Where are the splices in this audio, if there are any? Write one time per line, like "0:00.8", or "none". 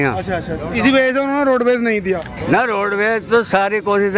none